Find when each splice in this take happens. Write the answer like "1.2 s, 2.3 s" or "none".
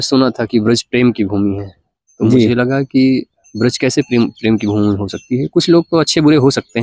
none